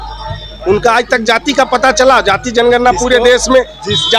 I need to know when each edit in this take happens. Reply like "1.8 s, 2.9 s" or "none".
none